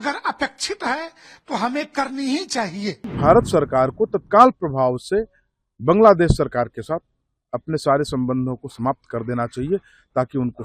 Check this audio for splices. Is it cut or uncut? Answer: cut